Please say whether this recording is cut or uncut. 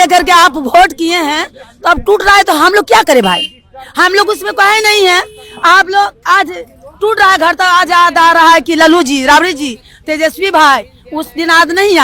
uncut